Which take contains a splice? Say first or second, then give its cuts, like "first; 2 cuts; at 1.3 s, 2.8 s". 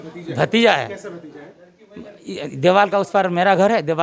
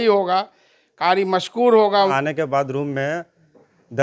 second; 1 cut; at 2.1 s